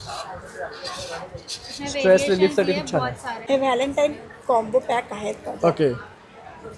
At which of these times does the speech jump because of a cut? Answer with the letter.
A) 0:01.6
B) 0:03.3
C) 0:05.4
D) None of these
B